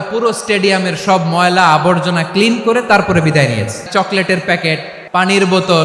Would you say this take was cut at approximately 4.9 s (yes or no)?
yes